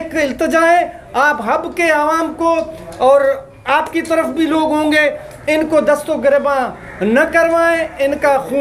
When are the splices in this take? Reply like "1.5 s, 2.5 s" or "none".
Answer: none